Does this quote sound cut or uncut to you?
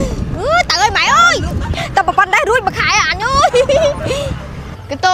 uncut